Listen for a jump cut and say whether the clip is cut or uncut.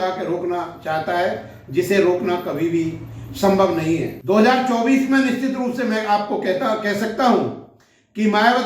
uncut